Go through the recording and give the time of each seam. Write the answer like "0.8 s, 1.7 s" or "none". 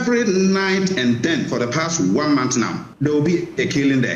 2.8 s